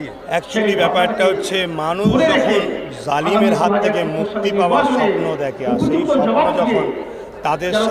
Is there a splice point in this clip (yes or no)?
no